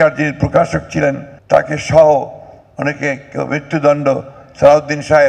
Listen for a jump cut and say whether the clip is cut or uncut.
cut